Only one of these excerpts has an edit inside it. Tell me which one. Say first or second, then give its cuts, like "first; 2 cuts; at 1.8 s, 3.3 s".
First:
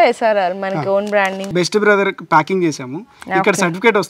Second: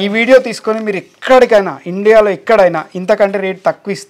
first; 1 cut; at 1.5 s